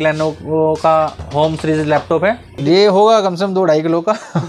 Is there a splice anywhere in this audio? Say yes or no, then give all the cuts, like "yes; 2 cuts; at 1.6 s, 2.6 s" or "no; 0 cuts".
yes; 1 cut; at 2.5 s